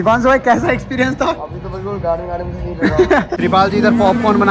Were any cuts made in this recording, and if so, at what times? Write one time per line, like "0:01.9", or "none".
0:03.3